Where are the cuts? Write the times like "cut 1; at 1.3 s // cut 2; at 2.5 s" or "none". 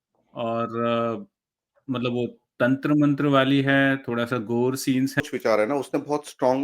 cut 1; at 5.2 s